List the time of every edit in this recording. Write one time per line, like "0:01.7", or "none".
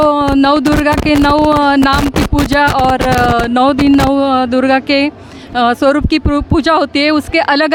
none